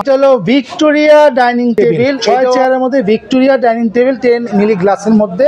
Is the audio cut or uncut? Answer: cut